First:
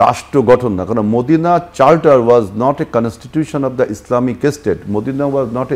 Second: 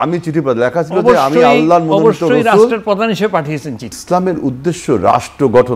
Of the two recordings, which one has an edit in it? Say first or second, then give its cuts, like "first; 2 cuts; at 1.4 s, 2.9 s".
second; 1 cut; at 3.9 s